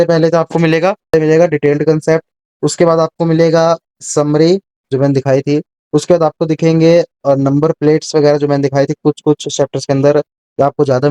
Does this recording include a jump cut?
yes; 1 cut; at 1.0 s

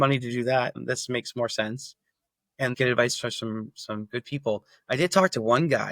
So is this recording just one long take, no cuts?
no; 1 cut; at 2.7 s

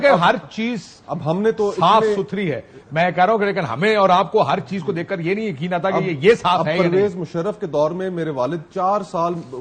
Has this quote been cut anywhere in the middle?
no; 0 cuts

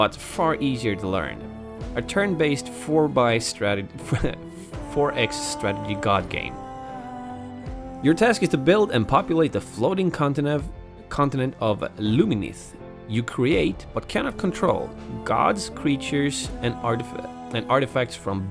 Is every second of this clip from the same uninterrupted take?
no; 1 cut; at 16.9 s

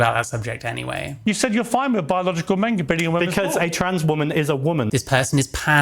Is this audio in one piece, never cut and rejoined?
no; 2 cuts; at 1.2 s, 4.9 s

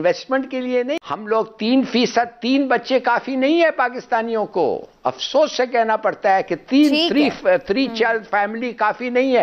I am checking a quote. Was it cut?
yes; 1 cut; at 0.9 s

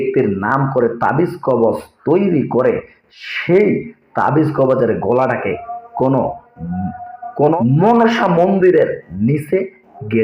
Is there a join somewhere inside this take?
yes; 1 cut; at 7.6 s

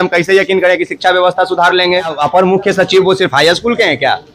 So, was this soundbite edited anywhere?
yes; 1 cut; at 2.2 s

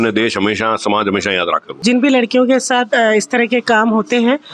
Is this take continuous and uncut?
no; 1 cut; at 1.8 s

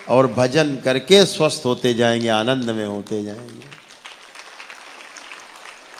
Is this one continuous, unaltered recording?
yes; 0 cuts

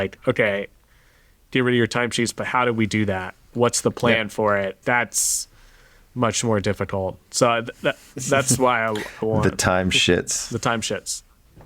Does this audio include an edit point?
yes; 2 cuts; at 3.5 s, 4.8 s

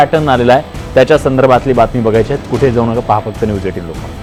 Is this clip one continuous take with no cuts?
yes; 0 cuts

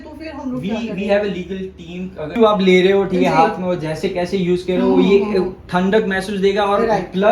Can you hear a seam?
yes; 1 cut; at 2.3 s

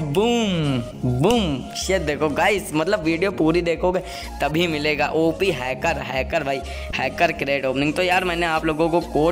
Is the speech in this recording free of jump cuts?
yes; 0 cuts

